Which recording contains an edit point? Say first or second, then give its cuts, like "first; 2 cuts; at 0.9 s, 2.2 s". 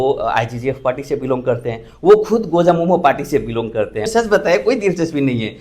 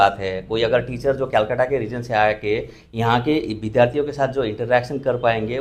first; 1 cut; at 4.1 s